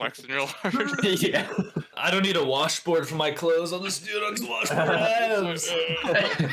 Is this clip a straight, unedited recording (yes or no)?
no